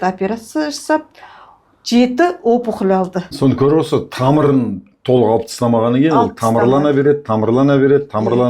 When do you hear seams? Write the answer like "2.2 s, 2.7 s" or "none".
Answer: 3.2 s